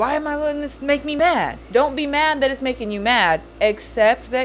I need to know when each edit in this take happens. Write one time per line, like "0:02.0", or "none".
0:01.2

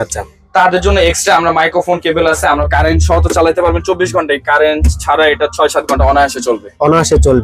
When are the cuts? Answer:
0:02.5

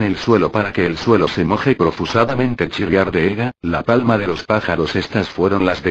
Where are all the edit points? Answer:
0:01.3

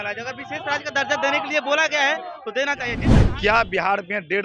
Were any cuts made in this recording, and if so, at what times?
0:03.1

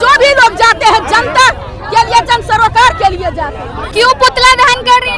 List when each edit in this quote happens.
none

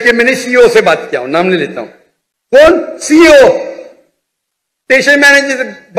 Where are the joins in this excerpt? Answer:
none

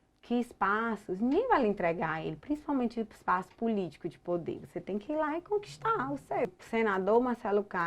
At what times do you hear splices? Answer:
0:06.6

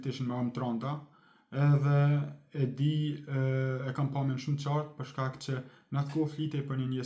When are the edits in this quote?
none

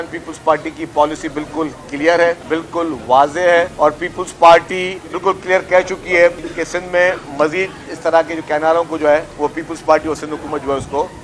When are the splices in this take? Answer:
0:02.4
0:03.7
0:05.1
0:06.4
0:09.3

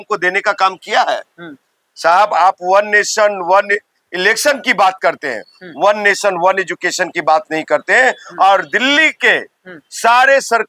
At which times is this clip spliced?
none

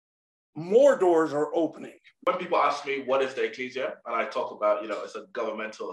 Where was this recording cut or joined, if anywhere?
0:02.2

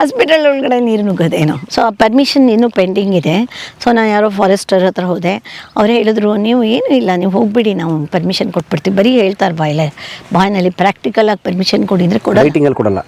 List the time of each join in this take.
0:01.6

